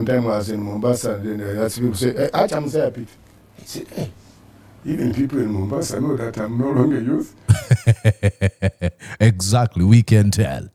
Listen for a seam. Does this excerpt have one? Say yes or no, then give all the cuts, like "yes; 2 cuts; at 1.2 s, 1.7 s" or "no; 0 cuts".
no; 0 cuts